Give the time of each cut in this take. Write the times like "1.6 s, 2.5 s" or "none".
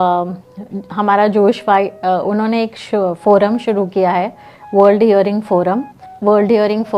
6.1 s